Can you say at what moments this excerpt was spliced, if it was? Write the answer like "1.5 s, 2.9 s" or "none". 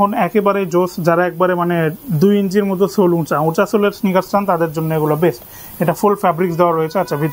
none